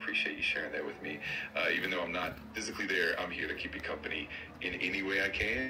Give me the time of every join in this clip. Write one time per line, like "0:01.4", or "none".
none